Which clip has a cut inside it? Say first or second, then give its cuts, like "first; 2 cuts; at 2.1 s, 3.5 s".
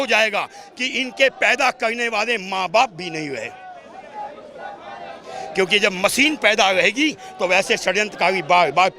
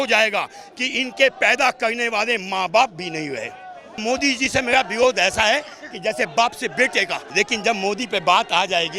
second; 2 cuts; at 4.0 s, 7.2 s